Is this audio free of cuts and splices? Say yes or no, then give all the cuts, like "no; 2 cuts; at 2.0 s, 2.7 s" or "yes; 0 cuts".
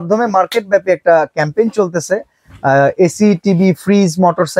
yes; 0 cuts